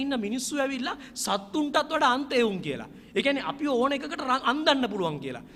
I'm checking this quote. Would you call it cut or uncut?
uncut